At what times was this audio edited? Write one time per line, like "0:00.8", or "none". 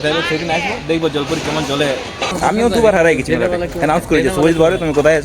0:02.3